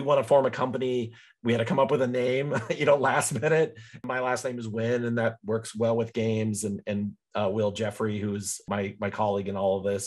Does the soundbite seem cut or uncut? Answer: cut